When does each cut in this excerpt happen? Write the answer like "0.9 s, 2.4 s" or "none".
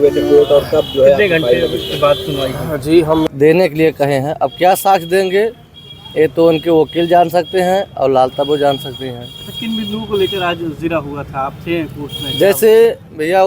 3.2 s